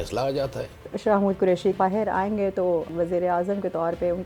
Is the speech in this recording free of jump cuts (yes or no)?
no